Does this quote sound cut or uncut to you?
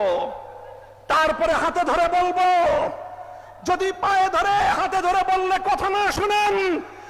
uncut